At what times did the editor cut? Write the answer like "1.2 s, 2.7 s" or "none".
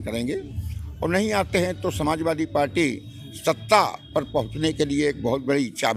none